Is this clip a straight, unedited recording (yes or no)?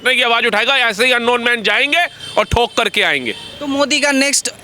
yes